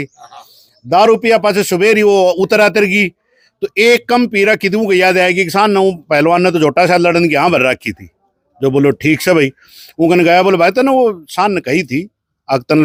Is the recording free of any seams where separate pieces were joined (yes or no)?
yes